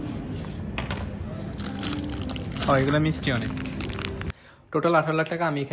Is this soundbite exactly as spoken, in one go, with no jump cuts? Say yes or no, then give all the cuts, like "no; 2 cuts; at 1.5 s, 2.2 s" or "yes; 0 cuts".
no; 1 cut; at 4.3 s